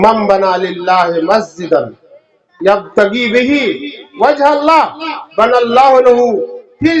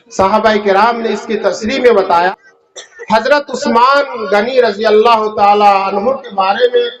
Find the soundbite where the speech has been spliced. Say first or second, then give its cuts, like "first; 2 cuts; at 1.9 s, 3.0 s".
second; 1 cut; at 2.3 s